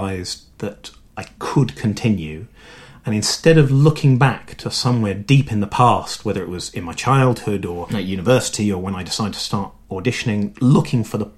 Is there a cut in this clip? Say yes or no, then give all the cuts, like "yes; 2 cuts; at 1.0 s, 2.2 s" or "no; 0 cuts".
no; 0 cuts